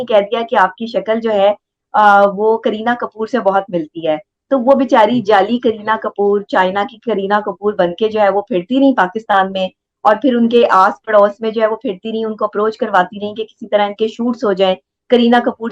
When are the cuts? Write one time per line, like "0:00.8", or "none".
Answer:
none